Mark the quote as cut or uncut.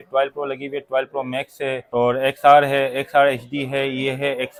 uncut